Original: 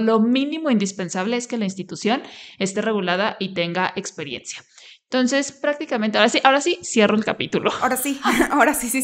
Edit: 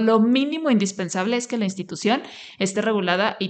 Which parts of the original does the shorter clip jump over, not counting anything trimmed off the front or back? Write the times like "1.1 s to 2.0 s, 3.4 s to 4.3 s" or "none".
none